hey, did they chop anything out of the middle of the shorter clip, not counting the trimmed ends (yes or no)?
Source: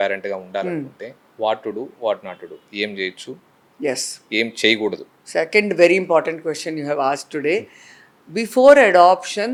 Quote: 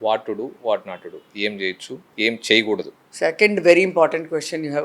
yes